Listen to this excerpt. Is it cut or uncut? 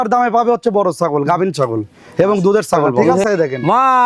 cut